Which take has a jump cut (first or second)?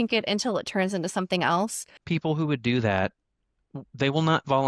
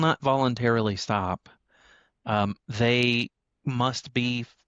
first